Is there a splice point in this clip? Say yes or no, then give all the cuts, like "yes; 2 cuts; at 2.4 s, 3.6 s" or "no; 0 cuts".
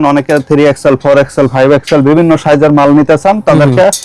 no; 0 cuts